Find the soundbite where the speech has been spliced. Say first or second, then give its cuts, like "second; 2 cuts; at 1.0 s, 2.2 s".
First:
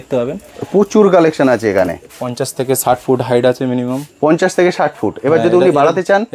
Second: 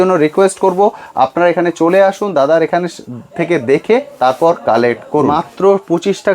second; 1 cut; at 5.3 s